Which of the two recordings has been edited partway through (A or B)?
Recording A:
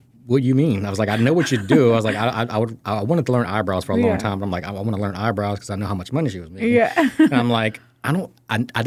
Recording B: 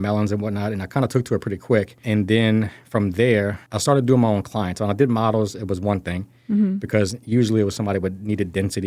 B